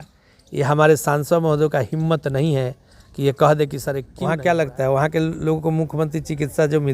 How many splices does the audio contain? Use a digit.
1